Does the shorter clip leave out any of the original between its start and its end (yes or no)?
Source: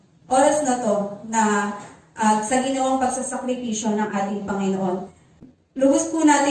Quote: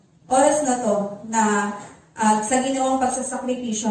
no